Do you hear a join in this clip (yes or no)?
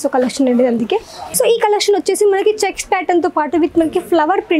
yes